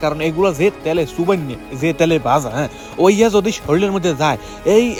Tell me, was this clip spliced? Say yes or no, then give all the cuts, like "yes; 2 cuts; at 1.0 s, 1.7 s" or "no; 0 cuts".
no; 0 cuts